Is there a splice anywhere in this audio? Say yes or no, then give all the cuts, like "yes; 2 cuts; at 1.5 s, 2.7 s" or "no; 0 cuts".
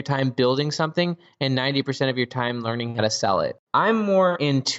yes; 1 cut; at 3.6 s